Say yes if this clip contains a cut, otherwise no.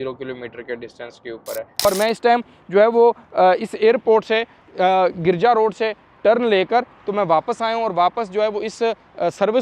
yes